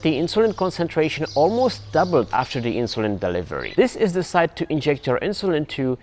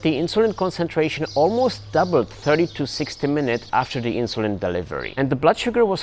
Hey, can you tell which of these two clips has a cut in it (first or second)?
first